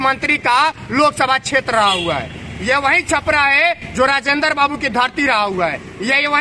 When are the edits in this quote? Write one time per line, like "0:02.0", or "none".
none